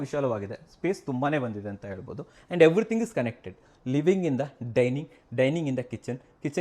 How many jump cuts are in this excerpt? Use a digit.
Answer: 0